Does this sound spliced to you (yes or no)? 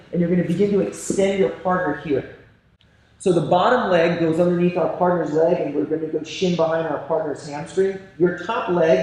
no